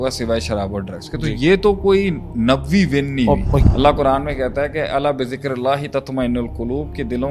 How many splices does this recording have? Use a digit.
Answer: 1